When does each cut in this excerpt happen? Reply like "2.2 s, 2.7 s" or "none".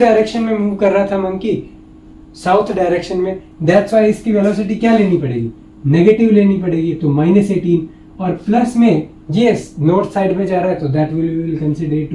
none